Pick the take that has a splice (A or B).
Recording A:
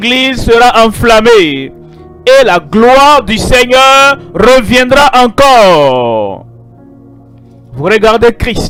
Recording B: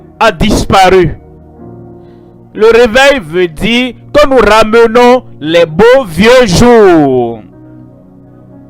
B